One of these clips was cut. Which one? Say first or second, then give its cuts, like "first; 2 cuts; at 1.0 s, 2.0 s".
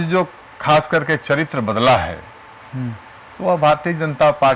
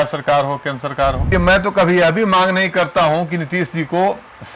second; 1 cut; at 1.3 s